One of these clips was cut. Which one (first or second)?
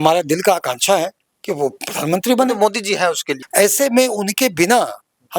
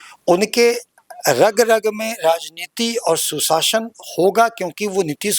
first